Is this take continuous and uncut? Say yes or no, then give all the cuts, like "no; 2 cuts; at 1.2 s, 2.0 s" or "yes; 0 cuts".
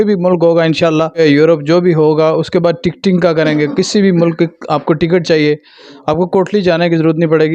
no; 1 cut; at 1.2 s